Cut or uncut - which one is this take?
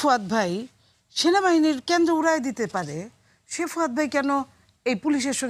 uncut